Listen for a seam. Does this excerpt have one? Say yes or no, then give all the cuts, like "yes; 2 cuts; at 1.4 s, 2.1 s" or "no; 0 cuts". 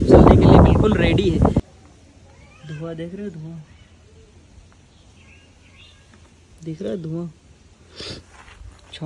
yes; 1 cut; at 1.6 s